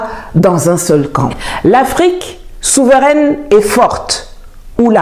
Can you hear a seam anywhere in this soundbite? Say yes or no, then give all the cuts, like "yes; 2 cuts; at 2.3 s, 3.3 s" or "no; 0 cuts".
yes; 1 cut; at 1.4 s